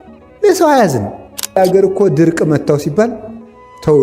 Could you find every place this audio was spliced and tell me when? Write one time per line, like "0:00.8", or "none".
0:01.5